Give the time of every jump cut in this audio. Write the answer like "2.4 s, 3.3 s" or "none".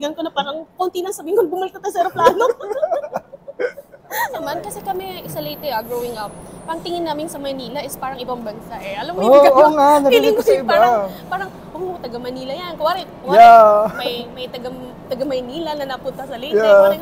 4.3 s